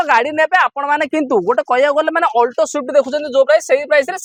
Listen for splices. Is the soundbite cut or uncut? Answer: uncut